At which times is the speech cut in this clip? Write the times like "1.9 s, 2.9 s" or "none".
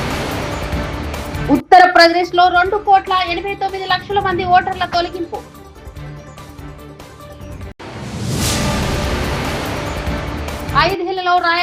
none